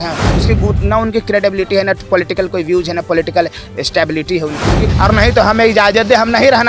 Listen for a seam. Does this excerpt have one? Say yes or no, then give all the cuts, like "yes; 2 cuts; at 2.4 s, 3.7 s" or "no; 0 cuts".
yes; 1 cut; at 4.8 s